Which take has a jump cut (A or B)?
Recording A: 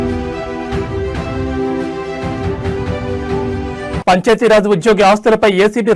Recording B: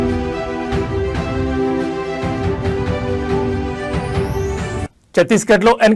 A